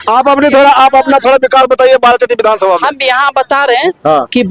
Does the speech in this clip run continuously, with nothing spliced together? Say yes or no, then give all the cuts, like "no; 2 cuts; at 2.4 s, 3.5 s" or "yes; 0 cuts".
yes; 0 cuts